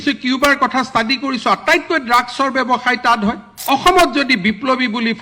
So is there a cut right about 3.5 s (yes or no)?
yes